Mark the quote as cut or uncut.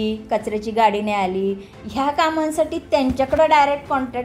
uncut